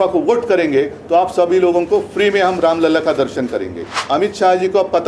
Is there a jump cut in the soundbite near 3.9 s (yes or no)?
yes